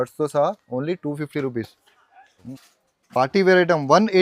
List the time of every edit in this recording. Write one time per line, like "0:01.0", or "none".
0:02.5